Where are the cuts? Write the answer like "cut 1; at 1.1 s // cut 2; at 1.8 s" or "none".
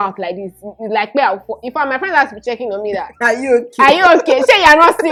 none